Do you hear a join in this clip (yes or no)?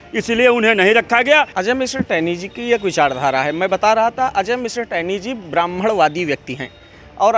yes